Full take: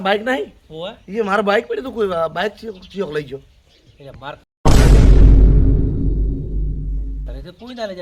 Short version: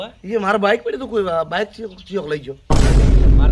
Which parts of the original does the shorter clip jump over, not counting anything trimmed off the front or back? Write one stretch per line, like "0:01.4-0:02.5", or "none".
0:03.4-0:04.5